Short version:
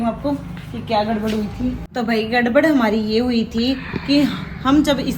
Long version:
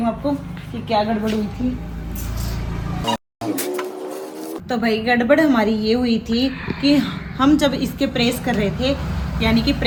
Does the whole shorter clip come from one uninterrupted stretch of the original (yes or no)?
no